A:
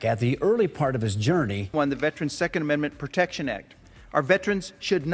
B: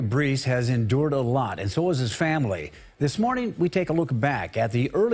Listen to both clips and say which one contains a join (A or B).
A